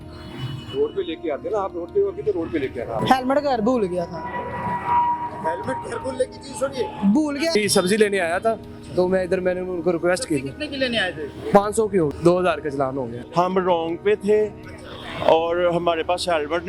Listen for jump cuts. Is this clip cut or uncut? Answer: cut